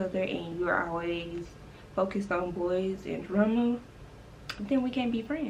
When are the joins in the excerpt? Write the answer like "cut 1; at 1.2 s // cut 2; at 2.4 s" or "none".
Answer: none

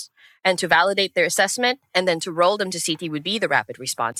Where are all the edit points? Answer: none

